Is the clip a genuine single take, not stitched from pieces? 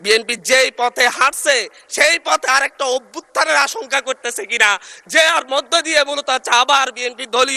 yes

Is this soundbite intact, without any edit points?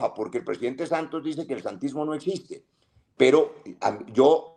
yes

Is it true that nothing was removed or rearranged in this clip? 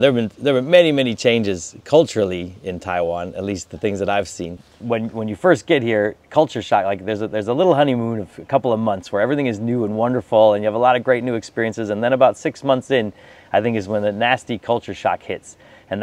yes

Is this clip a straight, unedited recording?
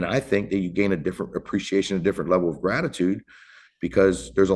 yes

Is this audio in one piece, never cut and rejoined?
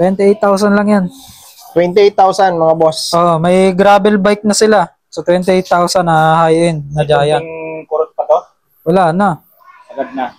yes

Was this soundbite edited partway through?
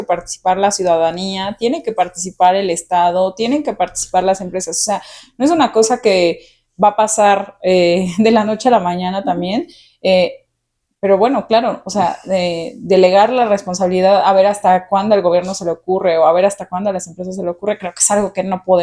no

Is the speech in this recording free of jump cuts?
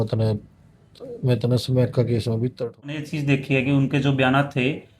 no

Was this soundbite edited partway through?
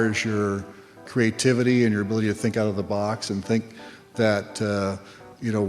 yes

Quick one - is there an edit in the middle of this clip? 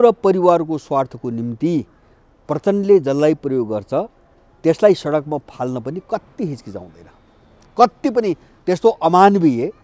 no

